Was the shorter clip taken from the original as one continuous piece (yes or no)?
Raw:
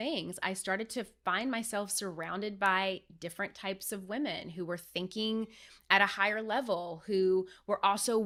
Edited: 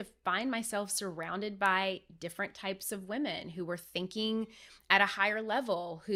yes